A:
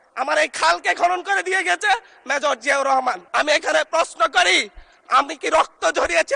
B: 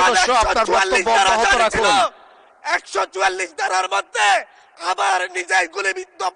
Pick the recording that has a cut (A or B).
A